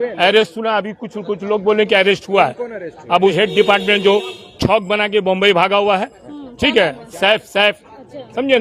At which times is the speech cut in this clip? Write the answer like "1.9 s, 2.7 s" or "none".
3.3 s